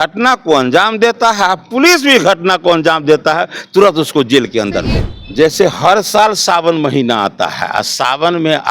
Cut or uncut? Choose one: cut